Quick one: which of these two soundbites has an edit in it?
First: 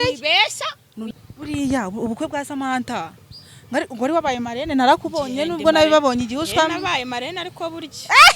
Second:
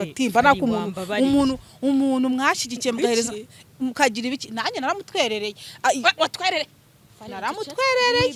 first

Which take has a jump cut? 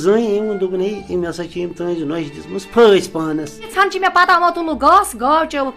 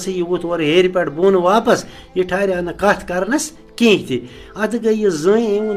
first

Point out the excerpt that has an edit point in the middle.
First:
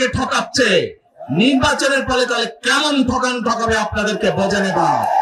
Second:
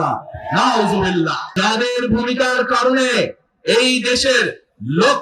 second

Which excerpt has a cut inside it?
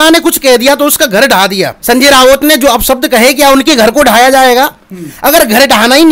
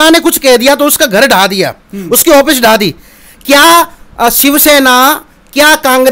first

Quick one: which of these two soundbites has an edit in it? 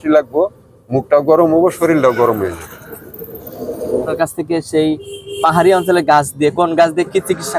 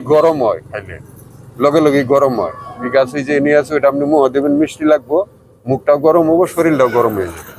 first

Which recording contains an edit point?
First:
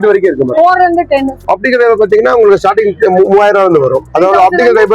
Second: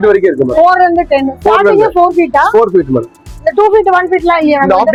first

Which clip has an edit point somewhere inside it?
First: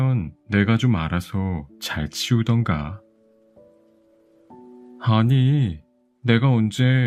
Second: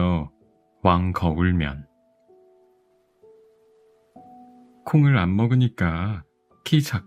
second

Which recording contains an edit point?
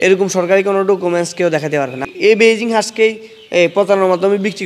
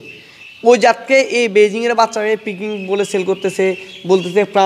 first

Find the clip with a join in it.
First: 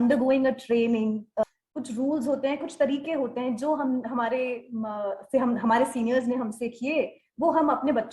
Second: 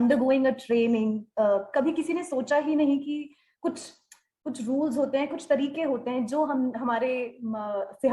first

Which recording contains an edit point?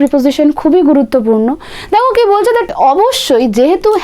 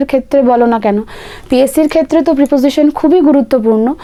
first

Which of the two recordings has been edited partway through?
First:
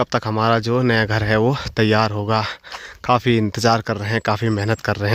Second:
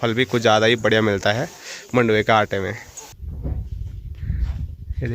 second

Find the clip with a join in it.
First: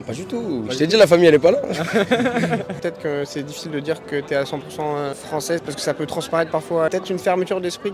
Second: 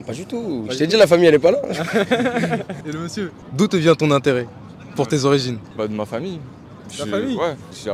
first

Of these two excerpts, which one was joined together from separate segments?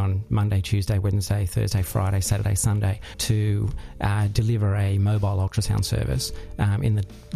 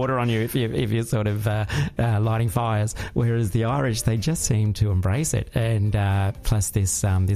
first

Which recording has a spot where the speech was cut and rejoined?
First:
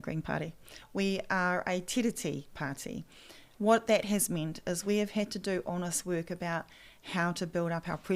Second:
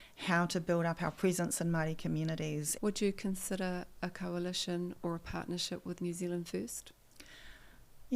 second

